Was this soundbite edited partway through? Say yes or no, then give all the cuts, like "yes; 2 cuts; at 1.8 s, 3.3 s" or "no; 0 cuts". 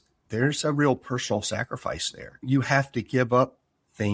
yes; 1 cut; at 2.3 s